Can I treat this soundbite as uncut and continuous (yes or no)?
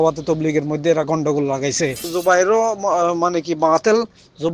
no